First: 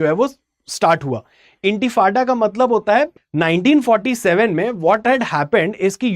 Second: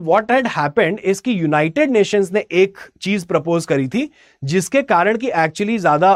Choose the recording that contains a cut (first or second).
first